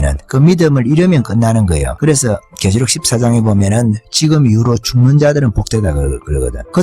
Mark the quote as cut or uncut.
cut